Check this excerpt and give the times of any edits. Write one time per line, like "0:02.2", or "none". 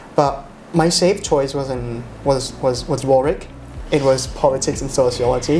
none